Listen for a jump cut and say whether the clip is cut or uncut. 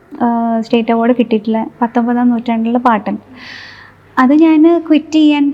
uncut